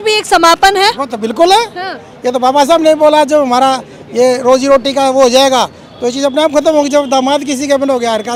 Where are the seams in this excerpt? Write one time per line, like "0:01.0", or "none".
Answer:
none

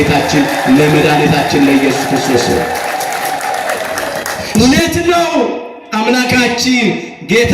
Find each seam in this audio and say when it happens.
0:04.4

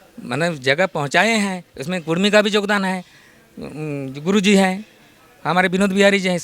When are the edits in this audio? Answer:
none

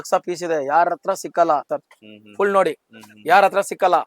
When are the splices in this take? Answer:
0:01.7

